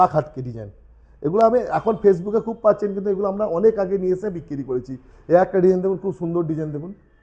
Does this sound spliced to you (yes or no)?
no